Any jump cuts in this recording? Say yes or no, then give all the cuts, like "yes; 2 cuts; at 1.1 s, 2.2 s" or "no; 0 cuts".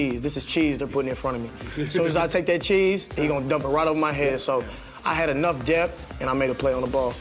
yes; 1 cut; at 6.1 s